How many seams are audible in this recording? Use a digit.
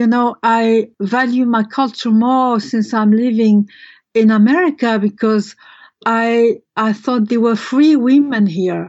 1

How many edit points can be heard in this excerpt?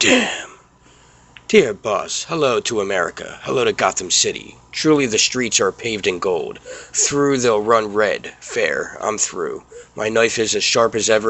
1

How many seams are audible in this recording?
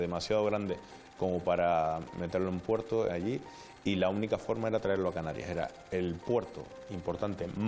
0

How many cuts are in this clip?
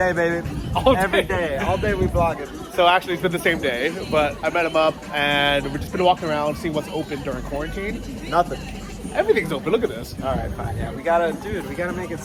0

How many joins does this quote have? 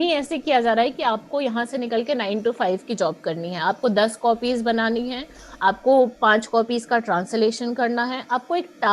0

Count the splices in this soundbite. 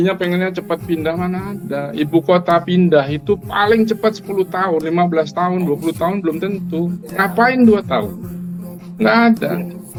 0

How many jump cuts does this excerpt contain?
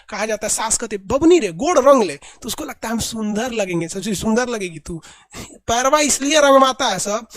0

